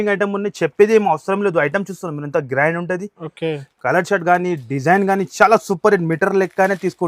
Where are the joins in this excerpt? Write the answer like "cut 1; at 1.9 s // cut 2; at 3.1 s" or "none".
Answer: none

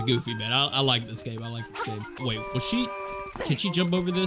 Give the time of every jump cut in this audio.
cut 1; at 2.2 s

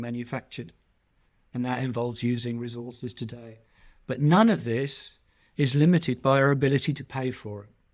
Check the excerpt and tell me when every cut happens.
none

